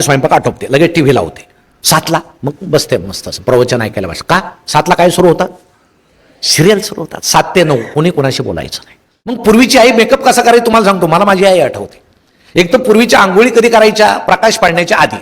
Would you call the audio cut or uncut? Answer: cut